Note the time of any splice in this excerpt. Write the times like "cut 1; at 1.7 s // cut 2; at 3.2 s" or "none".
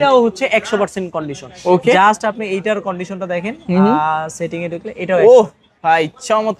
none